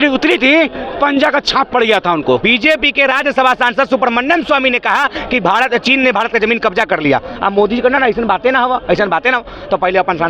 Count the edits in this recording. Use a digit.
1